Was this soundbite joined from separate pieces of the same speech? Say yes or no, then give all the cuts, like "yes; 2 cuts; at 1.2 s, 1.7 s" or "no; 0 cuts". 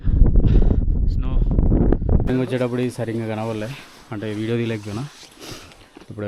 yes; 1 cut; at 2.3 s